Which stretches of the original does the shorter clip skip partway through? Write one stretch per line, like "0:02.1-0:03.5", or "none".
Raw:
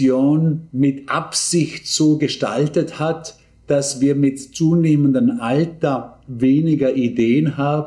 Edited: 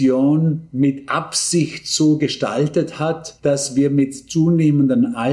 0:03.3-0:03.5